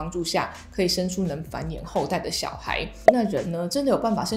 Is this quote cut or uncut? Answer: cut